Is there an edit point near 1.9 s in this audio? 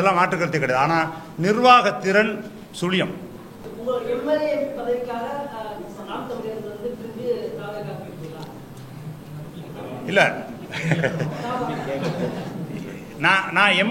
no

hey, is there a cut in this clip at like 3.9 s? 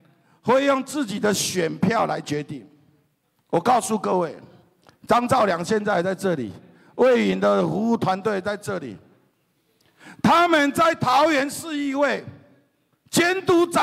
no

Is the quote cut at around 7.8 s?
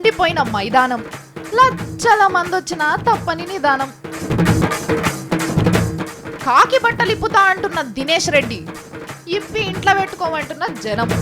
no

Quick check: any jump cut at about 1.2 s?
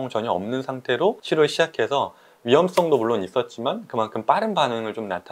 yes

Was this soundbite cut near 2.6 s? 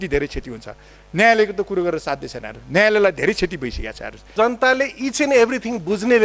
no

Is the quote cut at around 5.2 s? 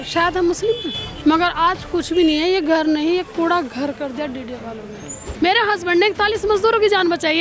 yes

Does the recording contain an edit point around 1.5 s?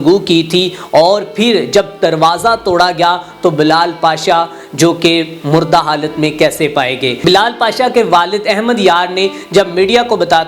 no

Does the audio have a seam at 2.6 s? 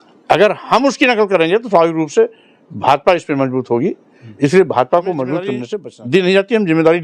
no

